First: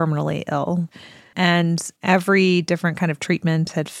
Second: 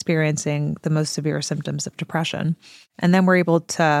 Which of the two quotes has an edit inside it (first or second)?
first